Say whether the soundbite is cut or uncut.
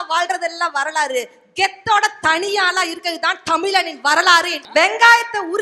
cut